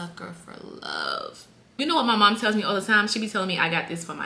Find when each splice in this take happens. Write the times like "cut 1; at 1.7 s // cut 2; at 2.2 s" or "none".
cut 1; at 1.8 s